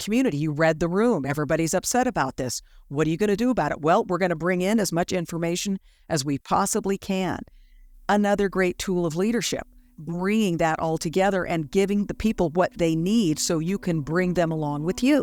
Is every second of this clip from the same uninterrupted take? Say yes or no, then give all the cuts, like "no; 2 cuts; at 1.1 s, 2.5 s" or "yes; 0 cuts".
yes; 0 cuts